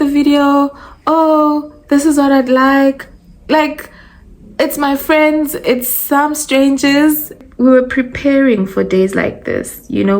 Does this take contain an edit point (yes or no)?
yes